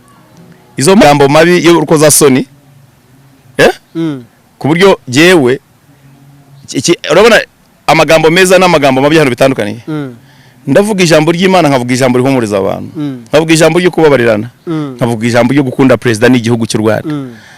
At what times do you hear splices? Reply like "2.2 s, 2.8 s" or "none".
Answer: 1.0 s